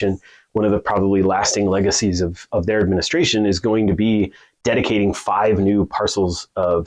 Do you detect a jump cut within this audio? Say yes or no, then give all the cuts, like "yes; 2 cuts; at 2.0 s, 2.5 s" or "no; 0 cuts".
yes; 1 cut; at 2.4 s